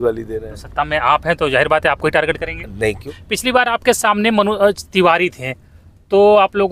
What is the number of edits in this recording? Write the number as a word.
one